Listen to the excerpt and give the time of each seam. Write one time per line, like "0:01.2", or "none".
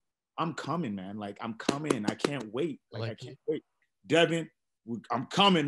0:03.9